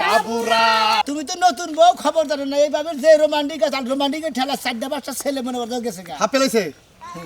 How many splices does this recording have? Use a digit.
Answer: 1